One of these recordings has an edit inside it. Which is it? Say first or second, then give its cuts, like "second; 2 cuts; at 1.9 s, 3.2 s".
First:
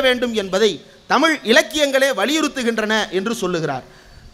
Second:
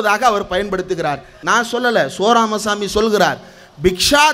second; 1 cut; at 1.4 s